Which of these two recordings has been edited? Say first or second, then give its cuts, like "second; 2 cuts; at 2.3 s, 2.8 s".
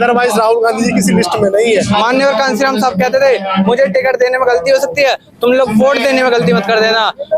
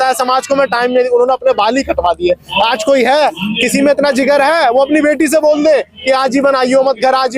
first; 1 cut; at 1.9 s